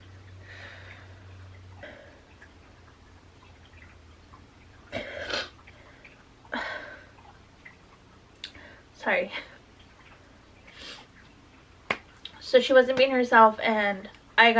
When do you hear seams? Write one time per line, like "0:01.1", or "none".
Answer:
none